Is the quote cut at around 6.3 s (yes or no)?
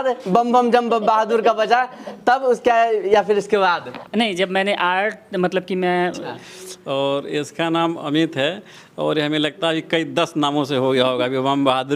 yes